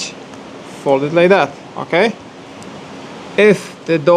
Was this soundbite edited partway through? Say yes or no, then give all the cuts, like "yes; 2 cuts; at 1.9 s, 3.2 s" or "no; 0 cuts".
no; 0 cuts